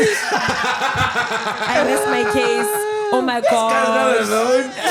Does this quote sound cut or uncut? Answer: uncut